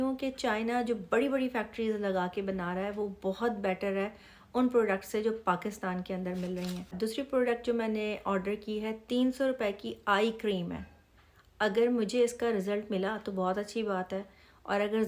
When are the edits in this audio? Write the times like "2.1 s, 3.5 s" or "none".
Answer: 6.8 s